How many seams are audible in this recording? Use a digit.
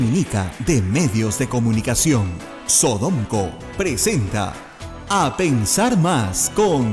0